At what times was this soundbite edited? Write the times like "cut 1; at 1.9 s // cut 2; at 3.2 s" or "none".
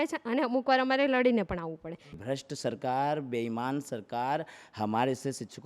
cut 1; at 2.1 s